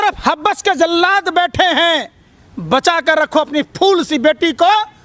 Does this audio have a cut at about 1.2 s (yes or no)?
no